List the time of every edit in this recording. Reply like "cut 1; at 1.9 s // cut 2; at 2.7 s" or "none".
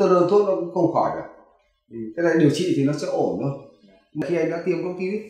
cut 1; at 4.2 s